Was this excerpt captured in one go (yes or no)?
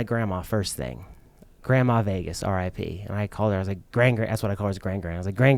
yes